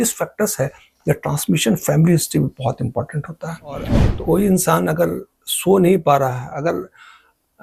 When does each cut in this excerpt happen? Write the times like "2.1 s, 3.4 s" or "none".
4.0 s

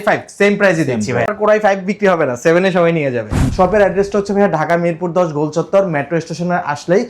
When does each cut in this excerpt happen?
1.3 s, 3.5 s

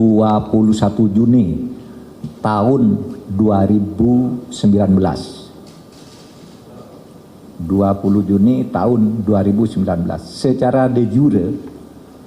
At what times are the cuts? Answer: none

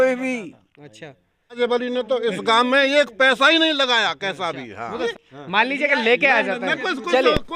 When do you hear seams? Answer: 1.6 s, 5.2 s

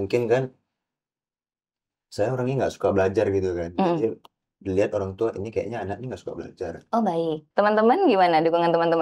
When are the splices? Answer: 7.4 s

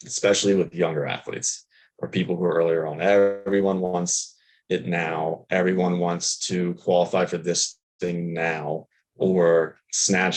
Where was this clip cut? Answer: none

